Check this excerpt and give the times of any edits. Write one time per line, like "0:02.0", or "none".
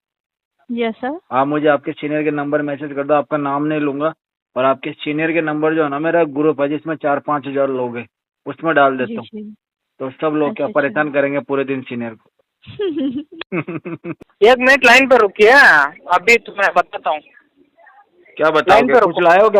0:14.3